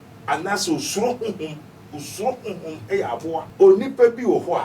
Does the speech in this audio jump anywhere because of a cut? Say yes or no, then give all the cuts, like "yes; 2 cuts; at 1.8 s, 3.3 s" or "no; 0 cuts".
yes; 1 cut; at 3.5 s